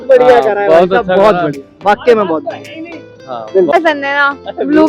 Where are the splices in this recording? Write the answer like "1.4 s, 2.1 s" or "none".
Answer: 3.7 s

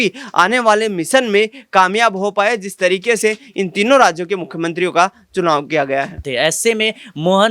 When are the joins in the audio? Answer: 6.3 s

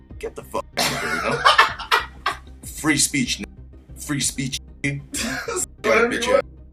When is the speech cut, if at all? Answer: none

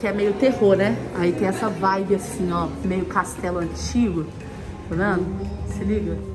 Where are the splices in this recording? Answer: none

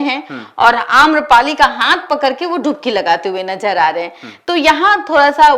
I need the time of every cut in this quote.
none

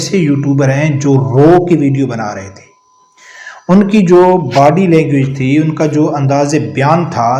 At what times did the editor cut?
none

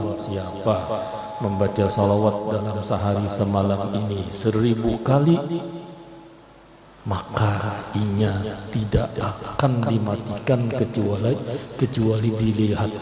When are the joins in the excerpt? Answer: none

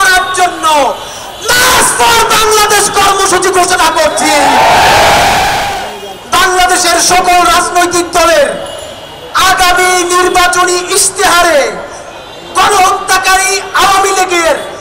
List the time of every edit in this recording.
5.7 s

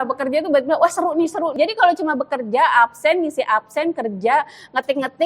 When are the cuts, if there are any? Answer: 1.6 s

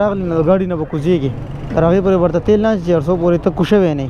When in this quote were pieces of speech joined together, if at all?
none

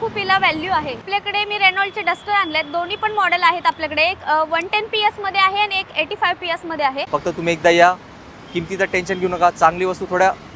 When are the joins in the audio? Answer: 1.0 s, 7.0 s

